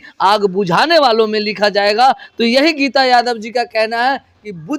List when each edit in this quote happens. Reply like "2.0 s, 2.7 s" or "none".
none